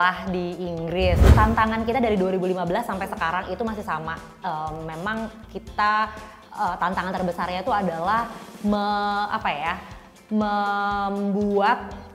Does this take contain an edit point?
yes; 1 cut; at 1.3 s

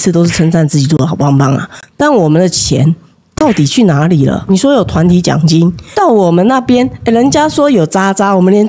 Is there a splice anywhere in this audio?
yes; 2 cuts; at 4.5 s, 5.8 s

